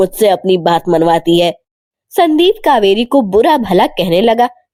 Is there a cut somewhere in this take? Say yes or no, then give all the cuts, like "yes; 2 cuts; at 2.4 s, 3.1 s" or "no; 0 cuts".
no; 0 cuts